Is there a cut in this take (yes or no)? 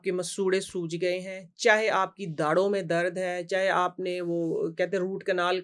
no